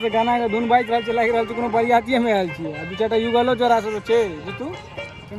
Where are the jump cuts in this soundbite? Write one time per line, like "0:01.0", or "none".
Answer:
none